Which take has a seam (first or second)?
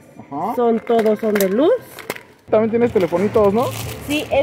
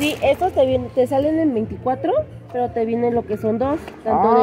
first